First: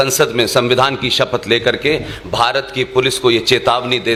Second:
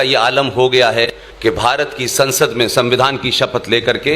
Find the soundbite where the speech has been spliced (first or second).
second